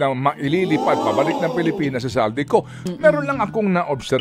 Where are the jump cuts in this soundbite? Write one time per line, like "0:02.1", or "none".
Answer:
0:02.9